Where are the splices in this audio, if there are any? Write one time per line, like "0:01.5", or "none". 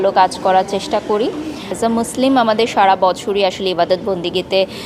0:01.8